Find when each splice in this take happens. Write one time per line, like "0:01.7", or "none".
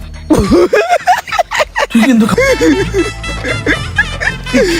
0:02.3